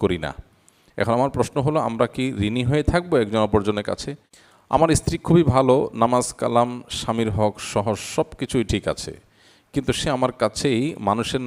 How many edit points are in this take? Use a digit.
1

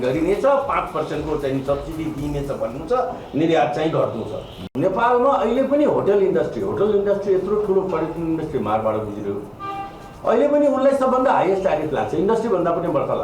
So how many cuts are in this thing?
1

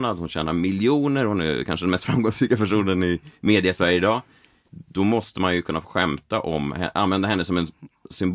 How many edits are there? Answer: 0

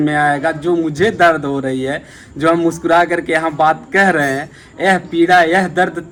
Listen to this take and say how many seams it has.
0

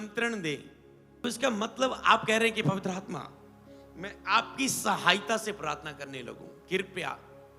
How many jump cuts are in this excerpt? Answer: 1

